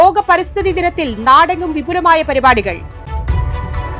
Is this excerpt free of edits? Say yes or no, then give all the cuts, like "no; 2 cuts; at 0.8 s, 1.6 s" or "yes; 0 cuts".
yes; 0 cuts